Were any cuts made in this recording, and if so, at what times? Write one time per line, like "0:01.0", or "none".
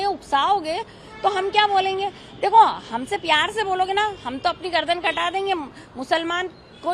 none